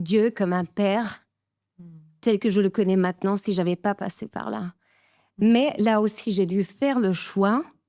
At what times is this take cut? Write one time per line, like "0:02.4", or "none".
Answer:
none